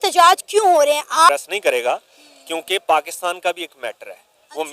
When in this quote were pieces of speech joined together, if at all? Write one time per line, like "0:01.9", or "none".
0:01.3